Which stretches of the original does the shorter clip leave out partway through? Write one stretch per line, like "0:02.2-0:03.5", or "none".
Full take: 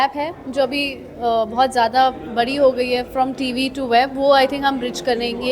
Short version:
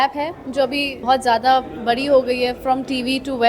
0:01.0-0:01.5